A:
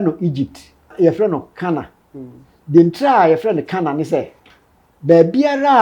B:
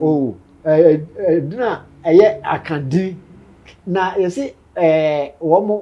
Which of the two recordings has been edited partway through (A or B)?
A